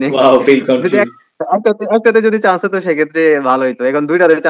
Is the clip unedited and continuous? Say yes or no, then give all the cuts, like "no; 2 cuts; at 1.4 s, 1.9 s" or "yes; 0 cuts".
yes; 0 cuts